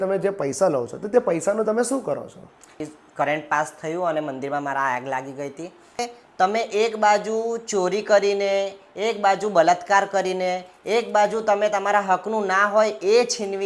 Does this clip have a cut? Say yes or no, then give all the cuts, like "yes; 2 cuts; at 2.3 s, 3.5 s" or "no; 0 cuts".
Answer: yes; 2 cuts; at 2.8 s, 6.1 s